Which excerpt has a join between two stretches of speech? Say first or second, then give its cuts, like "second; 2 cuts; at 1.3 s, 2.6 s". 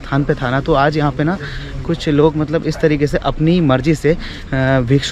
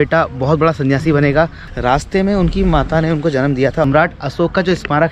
second; 2 cuts; at 1.7 s, 3.8 s